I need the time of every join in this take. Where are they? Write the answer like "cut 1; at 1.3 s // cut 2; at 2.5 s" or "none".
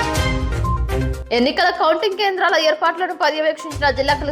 cut 1; at 1.1 s